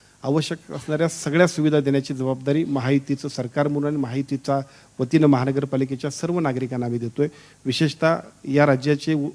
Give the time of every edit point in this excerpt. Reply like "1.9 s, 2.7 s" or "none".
none